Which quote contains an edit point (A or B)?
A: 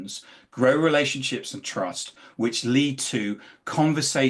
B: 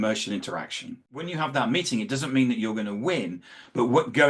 B